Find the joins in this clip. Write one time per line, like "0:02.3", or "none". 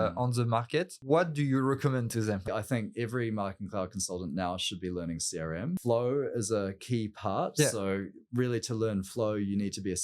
0:01.0
0:02.5
0:05.8